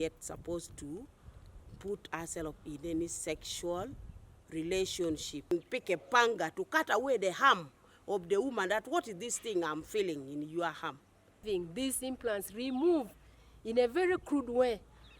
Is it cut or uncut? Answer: cut